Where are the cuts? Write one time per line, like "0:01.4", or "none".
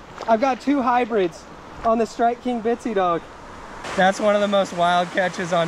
0:03.8